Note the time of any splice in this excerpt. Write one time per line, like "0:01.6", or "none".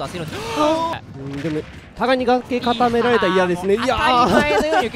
0:00.9